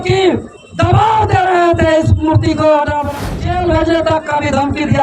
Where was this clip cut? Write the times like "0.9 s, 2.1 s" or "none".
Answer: 3.3 s